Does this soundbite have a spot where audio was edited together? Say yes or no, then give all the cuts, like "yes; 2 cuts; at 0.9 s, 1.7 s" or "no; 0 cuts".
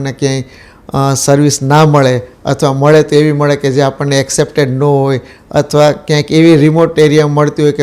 no; 0 cuts